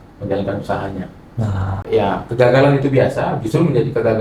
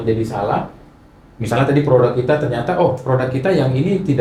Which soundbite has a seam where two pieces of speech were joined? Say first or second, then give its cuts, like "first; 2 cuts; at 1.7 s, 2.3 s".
first; 1 cut; at 1.7 s